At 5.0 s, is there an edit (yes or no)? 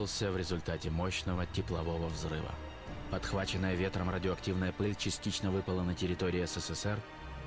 yes